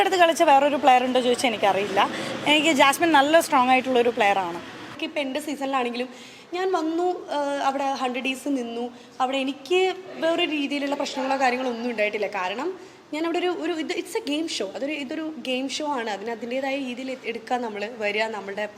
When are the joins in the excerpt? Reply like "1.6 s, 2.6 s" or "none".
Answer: 5.0 s

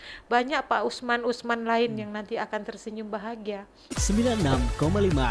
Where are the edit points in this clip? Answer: 4.1 s

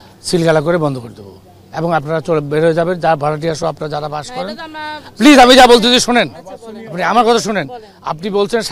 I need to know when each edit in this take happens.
none

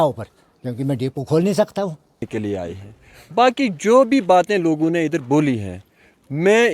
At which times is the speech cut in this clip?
2.3 s

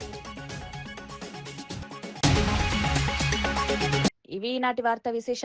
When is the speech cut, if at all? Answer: none

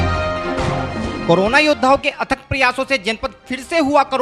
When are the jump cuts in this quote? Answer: 0.9 s

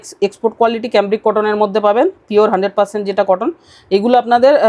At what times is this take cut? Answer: none

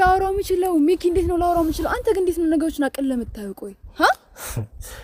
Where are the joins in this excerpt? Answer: none

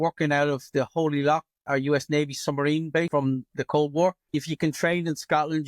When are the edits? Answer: 1.6 s, 3.1 s, 4.3 s

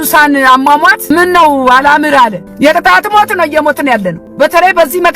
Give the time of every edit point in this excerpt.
1.1 s, 2.4 s, 4.2 s

